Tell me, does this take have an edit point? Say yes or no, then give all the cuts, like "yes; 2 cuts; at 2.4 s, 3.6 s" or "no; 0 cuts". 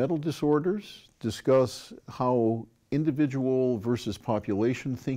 no; 0 cuts